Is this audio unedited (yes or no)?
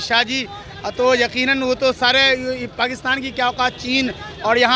yes